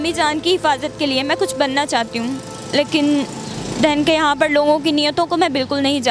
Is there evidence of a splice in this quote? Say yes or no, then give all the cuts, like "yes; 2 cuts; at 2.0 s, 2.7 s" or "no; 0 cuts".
no; 0 cuts